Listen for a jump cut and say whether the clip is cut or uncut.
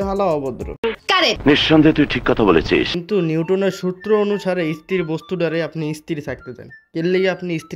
cut